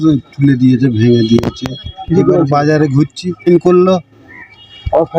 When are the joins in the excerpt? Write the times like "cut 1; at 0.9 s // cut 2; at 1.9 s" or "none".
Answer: cut 1; at 3.5 s